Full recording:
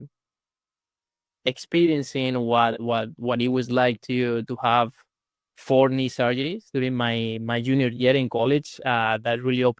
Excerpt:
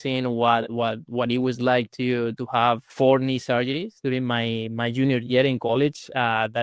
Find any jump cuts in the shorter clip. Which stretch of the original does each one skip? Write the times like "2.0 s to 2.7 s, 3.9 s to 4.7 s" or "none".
5.0 s to 5.6 s